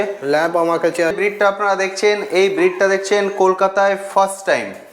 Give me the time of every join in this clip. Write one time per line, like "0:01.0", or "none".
0:01.2

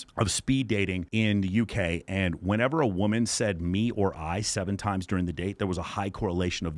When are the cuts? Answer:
none

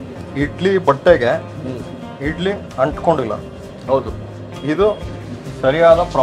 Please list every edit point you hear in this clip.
none

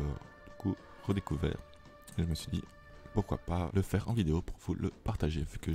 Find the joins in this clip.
0:03.7

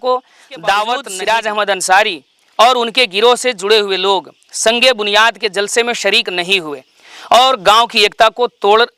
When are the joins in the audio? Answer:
0:01.1

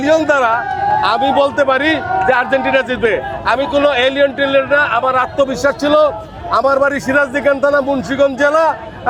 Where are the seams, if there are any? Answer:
none

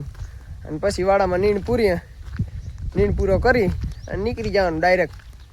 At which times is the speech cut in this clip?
none

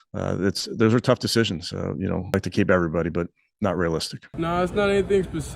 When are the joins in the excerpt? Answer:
0:02.3
0:04.2

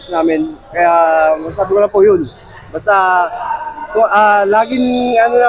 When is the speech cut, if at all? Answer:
none

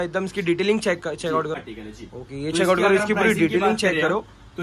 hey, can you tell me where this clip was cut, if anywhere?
0:01.6

